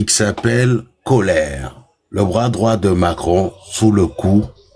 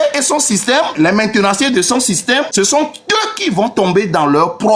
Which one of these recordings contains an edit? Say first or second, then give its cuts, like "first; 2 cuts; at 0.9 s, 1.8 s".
second; 2 cuts; at 0.9 s, 2.5 s